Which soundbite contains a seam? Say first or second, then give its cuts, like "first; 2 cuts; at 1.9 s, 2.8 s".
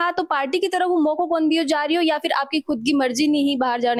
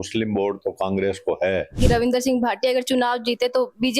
second; 1 cut; at 1.8 s